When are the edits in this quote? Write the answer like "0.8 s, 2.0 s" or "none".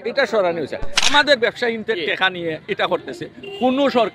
1.1 s